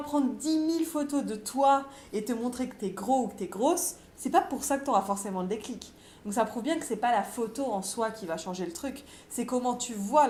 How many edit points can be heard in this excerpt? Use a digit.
0